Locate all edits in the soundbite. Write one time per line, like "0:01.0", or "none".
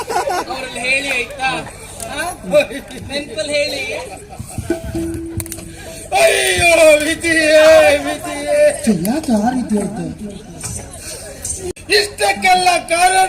0:11.7